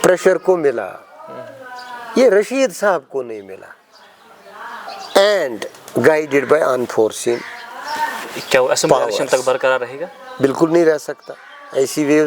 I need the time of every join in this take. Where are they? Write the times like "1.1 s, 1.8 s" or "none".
4.9 s